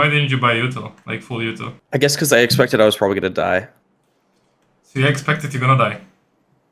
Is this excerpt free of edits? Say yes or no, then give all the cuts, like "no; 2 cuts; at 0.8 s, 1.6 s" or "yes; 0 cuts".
no; 1 cut; at 1.7 s